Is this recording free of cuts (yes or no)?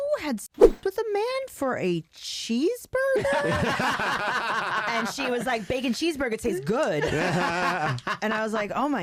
yes